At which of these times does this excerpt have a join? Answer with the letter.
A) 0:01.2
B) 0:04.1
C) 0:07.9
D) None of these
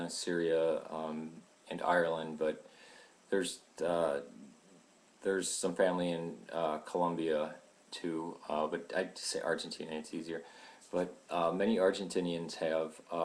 A